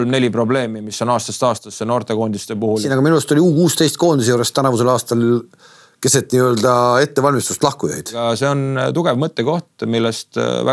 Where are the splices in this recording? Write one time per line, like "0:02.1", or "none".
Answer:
0:02.8
0:08.2